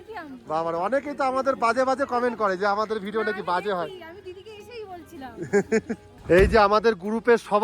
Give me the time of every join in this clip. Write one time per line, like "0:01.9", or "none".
0:06.2